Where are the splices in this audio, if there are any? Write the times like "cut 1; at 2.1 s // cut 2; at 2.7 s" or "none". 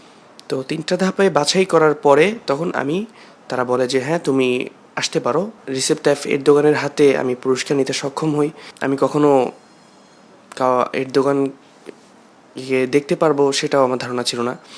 cut 1; at 5.6 s // cut 2; at 8.7 s

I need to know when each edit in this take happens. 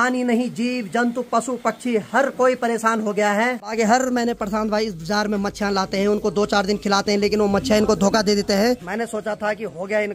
cut 1; at 3.7 s // cut 2; at 8.8 s

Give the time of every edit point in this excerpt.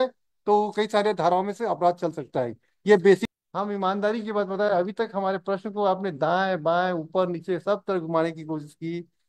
cut 1; at 3.3 s

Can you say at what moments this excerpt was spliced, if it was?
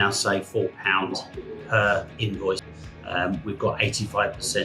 cut 1; at 2.7 s

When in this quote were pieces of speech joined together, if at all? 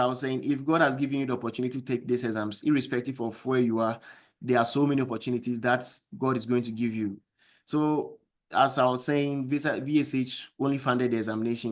none

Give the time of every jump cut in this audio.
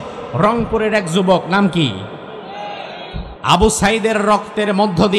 cut 1; at 3.3 s

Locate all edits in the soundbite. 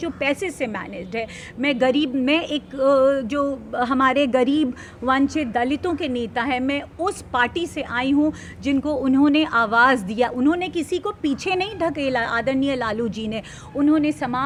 none

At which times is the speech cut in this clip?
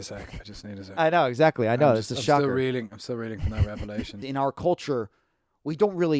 cut 1; at 4.2 s

